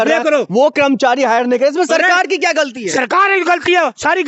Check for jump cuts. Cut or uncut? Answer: uncut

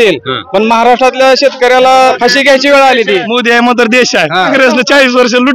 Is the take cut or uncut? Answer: cut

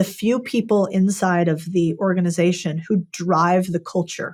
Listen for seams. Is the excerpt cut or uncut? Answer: uncut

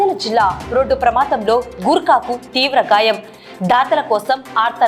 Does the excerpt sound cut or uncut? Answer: uncut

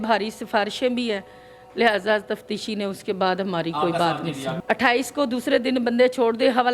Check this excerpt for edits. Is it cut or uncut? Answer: cut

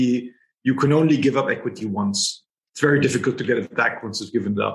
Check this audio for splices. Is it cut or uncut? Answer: uncut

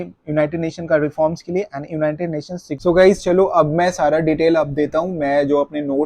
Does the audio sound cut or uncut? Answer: cut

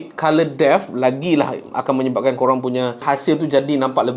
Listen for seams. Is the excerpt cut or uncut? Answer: uncut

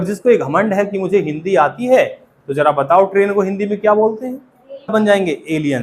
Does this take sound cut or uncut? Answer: cut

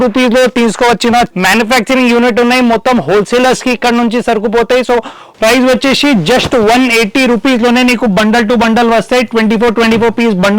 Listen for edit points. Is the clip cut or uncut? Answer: cut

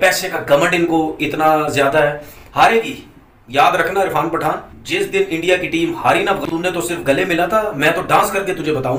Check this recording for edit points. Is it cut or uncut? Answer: uncut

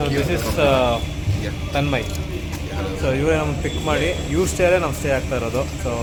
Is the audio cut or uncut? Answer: uncut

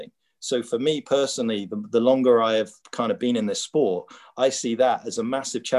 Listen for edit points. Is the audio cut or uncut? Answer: cut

